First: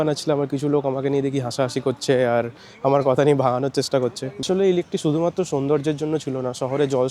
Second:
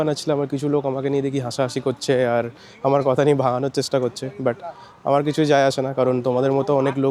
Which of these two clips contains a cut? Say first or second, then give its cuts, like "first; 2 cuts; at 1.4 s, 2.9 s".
first; 1 cut; at 4.3 s